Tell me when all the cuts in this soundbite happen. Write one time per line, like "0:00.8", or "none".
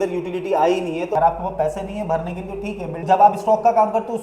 0:01.1
0:03.0